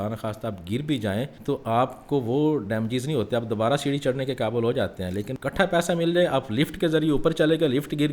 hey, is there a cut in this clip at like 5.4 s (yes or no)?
yes